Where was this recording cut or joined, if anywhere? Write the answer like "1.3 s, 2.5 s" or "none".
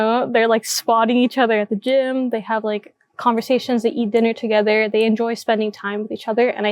none

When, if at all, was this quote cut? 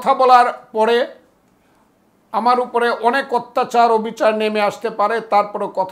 none

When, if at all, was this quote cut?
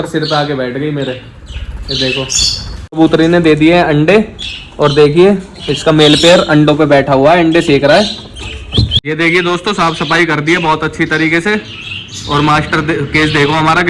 3.0 s, 9.0 s

